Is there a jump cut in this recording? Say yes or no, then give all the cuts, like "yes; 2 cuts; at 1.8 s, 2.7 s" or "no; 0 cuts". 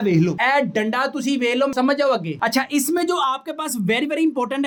no; 0 cuts